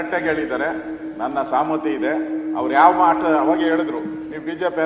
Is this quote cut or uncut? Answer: uncut